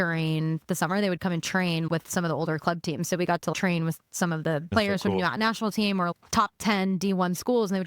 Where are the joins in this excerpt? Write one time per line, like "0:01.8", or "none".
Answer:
0:03.5